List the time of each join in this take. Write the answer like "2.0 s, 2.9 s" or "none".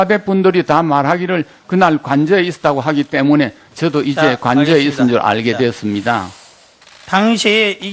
none